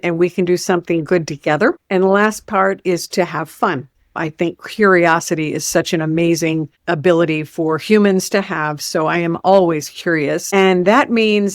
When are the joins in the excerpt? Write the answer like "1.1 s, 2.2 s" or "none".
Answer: 4.1 s